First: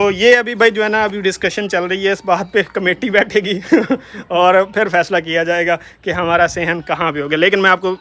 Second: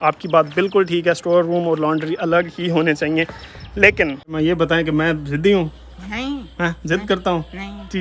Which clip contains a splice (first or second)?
second